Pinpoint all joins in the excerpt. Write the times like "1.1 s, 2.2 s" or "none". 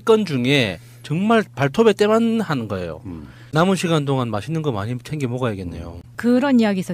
3.4 s